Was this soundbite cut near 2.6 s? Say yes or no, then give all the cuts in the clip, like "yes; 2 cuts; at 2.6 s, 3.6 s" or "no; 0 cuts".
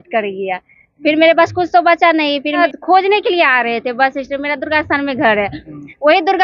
yes; 1 cut; at 2.6 s